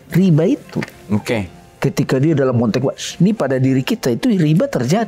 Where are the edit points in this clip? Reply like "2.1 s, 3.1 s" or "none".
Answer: none